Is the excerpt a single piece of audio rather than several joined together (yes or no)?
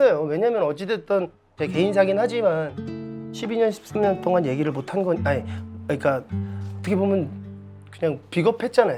yes